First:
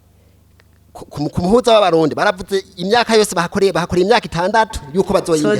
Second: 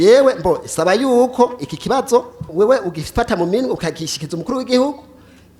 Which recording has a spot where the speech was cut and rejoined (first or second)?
second